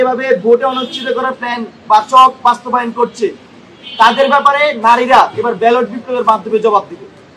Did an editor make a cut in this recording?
no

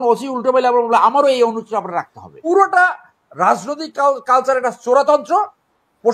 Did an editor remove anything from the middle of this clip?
yes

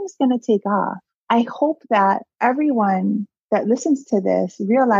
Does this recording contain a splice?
yes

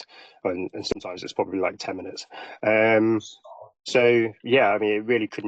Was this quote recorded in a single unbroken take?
yes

